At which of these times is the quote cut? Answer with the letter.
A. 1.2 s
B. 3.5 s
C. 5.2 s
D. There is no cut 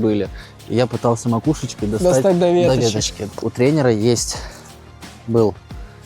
B